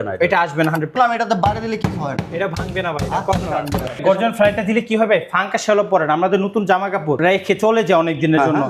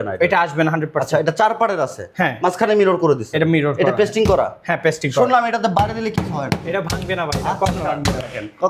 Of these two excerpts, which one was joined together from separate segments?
first; 3 cuts; at 0.9 s, 4.0 s, 7.2 s

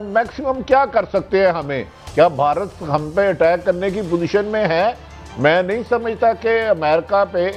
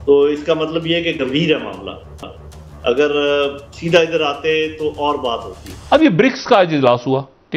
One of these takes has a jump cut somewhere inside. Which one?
second; 1 cut; at 5.5 s

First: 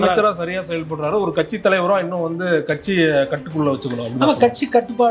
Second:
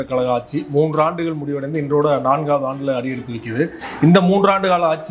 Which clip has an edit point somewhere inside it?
second; 1 cut; at 3.8 s

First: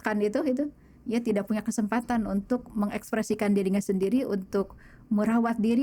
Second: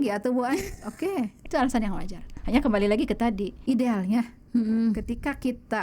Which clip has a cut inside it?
second; 2 cuts; at 1.4 s, 3.5 s

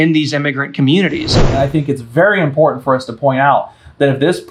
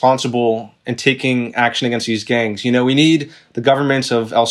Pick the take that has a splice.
first; 1 cut; at 1.4 s

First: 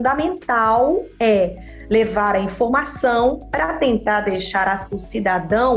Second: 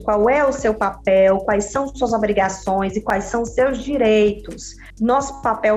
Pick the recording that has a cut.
second; 1 cut; at 4.9 s

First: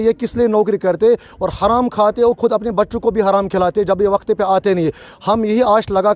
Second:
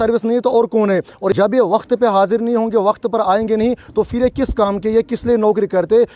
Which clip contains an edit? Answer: second; 1 cut; at 1.3 s

